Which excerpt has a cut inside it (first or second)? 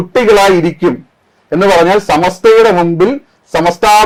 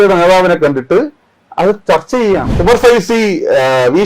second